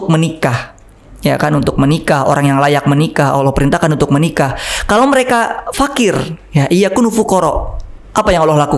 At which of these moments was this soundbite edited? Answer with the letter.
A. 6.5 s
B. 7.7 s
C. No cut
C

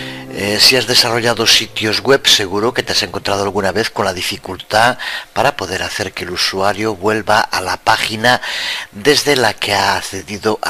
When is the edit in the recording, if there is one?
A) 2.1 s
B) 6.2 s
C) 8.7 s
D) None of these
D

